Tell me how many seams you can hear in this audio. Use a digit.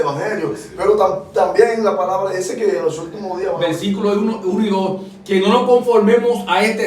1